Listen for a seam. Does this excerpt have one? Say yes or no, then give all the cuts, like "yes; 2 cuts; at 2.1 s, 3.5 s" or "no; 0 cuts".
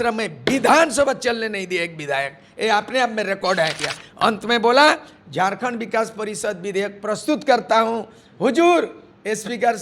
yes; 1 cut; at 3.9 s